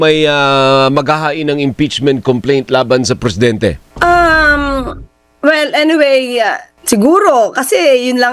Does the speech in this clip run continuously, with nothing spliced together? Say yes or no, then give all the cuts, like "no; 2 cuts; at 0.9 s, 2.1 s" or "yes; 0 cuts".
no; 2 cuts; at 3.9 s, 6.7 s